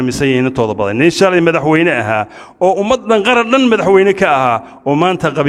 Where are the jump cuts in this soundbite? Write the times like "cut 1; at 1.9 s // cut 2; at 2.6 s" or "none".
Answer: none